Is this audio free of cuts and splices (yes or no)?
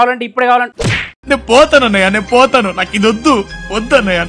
yes